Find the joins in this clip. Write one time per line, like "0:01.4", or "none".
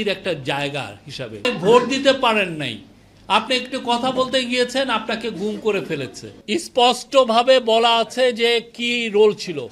0:01.4
0:06.3